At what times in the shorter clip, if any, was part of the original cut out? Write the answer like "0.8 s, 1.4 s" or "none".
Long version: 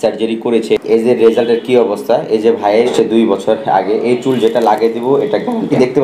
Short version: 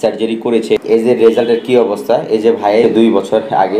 2.8 s

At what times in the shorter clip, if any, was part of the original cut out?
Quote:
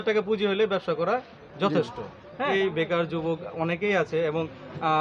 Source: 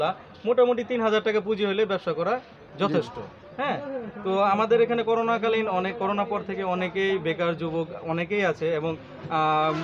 2.5 s

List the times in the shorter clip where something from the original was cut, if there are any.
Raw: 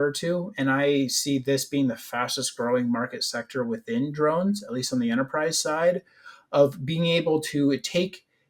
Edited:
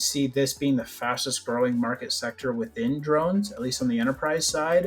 none

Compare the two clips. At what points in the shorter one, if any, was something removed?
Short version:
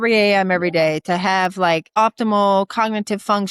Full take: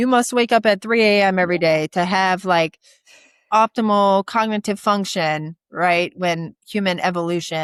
1.9 s

